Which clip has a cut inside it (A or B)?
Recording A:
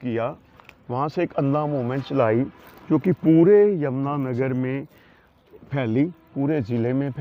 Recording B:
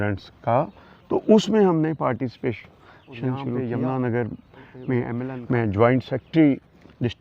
B